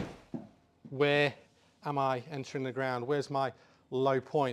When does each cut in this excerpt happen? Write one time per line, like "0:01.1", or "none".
none